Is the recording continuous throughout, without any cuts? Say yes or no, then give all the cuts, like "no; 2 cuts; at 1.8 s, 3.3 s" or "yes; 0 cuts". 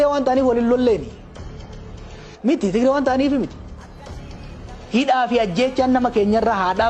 yes; 0 cuts